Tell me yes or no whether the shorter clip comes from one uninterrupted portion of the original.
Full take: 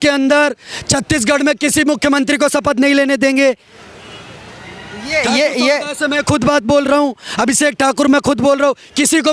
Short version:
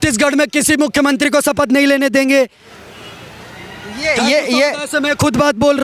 yes